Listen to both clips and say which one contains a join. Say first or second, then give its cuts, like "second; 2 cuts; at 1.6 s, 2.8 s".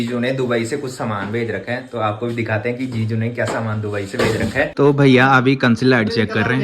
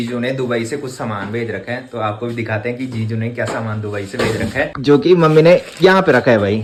first; 1 cut; at 4.7 s